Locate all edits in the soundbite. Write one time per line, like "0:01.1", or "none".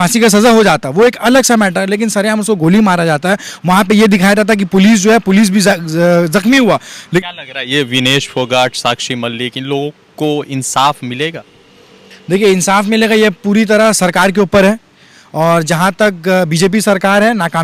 0:07.2